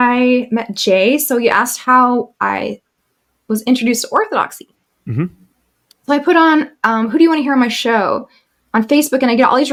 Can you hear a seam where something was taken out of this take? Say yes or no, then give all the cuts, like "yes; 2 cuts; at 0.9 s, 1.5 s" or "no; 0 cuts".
no; 0 cuts